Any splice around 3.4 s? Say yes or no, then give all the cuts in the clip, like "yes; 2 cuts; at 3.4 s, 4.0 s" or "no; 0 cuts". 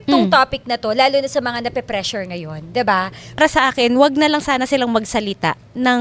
yes; 1 cut; at 3.4 s